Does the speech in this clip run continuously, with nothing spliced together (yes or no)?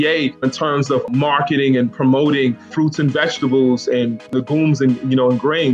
no